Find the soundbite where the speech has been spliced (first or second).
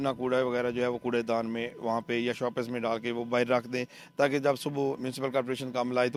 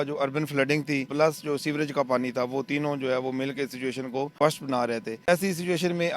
second